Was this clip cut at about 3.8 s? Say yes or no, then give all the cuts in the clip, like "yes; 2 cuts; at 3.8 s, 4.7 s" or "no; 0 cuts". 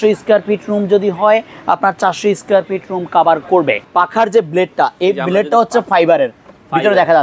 yes; 1 cut; at 3.8 s